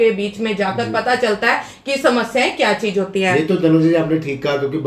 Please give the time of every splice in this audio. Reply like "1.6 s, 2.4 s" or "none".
none